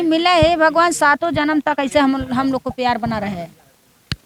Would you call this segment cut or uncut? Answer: uncut